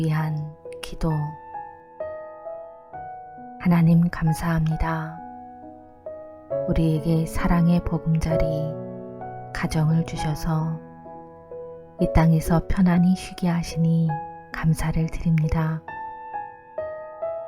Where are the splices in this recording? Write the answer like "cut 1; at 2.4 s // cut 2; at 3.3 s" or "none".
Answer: cut 1; at 1.4 s // cut 2; at 3.6 s